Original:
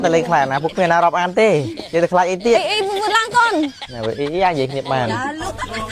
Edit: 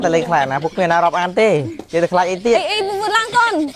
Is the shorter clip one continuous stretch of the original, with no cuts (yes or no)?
yes